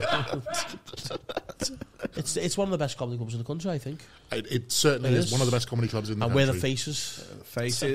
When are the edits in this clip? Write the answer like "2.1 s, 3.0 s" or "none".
2.1 s